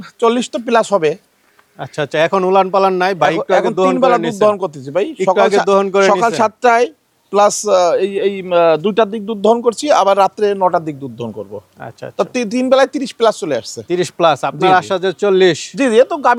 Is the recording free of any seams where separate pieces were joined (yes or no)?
yes